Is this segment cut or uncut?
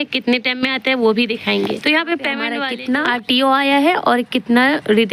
cut